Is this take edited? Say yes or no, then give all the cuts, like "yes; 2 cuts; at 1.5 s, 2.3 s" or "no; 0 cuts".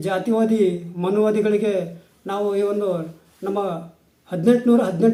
no; 0 cuts